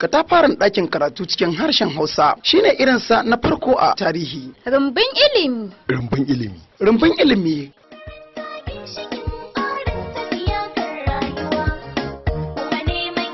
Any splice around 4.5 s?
no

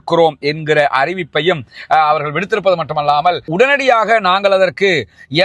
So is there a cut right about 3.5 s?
yes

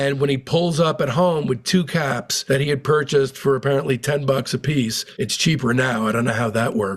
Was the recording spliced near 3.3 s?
no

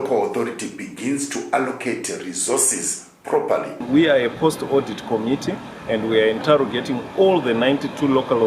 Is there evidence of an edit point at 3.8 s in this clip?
yes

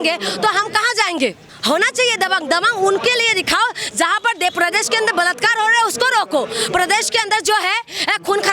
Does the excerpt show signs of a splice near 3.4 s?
no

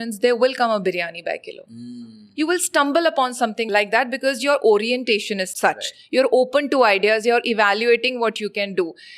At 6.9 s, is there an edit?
no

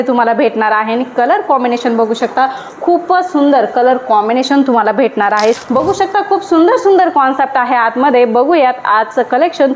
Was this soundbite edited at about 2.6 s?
no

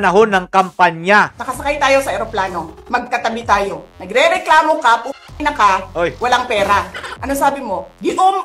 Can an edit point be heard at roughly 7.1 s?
yes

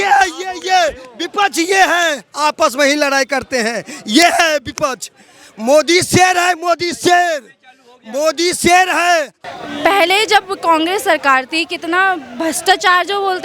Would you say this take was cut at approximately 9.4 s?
yes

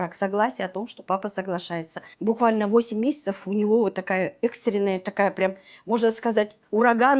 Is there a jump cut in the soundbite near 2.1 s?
yes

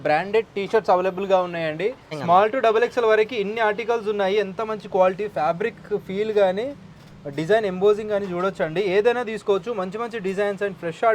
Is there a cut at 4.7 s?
no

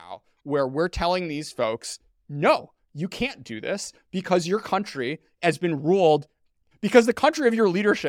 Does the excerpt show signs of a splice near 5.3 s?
no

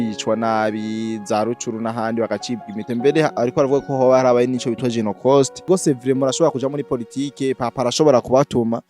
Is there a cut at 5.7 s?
yes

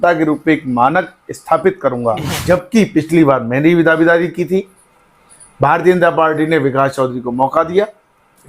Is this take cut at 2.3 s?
yes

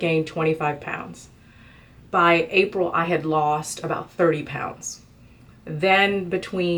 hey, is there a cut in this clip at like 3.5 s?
no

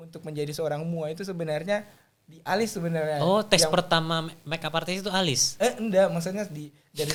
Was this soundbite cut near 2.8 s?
no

